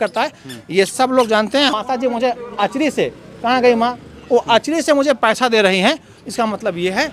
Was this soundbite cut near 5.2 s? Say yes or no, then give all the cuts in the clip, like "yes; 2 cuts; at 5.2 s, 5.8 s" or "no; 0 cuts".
no; 1 cut; at 1.7 s